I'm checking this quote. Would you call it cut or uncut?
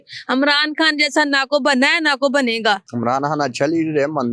cut